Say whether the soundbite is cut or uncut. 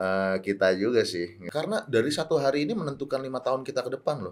cut